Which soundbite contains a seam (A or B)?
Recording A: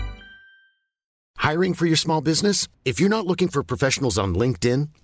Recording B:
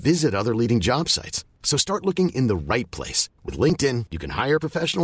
A